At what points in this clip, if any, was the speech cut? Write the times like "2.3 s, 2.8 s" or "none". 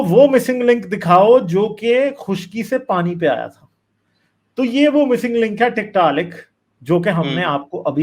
none